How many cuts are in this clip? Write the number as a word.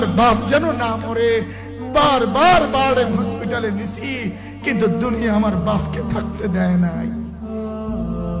one